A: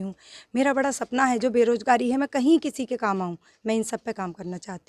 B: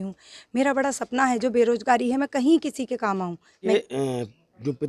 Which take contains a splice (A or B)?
B